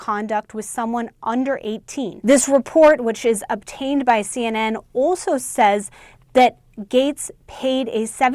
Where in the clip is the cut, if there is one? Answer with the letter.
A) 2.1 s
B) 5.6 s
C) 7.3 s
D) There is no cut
A